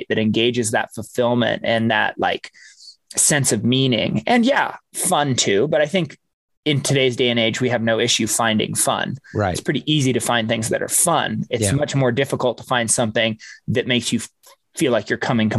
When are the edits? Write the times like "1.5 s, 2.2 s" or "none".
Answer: none